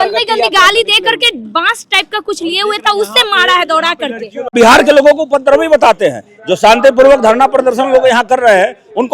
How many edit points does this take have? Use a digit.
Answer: 1